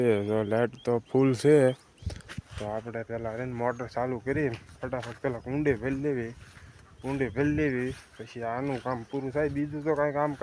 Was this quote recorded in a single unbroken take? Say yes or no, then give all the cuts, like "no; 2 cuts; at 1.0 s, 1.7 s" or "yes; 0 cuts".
yes; 0 cuts